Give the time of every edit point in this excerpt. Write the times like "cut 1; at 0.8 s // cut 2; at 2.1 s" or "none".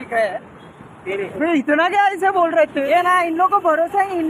cut 1; at 1.3 s // cut 2; at 2.8 s